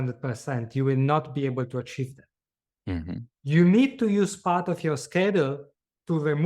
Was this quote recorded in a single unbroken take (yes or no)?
yes